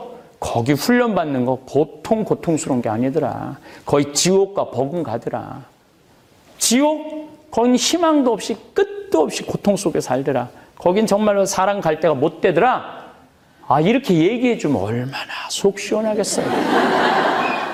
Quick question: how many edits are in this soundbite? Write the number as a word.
zero